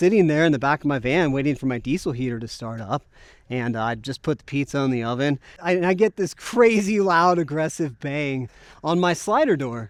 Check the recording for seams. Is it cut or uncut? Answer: uncut